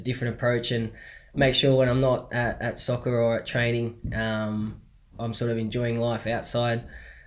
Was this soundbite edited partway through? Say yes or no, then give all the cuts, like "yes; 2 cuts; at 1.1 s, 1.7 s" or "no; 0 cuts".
no; 0 cuts